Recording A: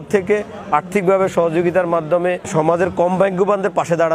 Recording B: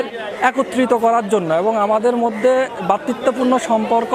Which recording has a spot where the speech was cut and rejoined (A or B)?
A